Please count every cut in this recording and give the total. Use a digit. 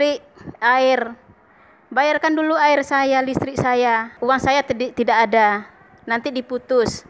1